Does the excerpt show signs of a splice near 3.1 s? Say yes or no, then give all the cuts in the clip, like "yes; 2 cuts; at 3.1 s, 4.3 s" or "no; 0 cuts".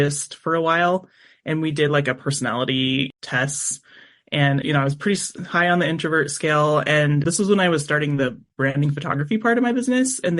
yes; 1 cut; at 3.1 s